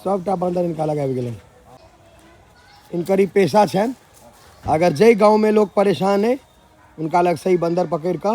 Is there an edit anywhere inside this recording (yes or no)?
yes